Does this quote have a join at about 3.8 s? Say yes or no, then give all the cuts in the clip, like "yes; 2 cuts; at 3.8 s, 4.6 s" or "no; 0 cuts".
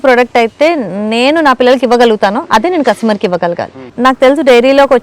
yes; 1 cut; at 3.8 s